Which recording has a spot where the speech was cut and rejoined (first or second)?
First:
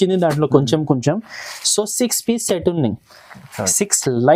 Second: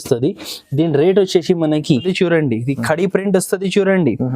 second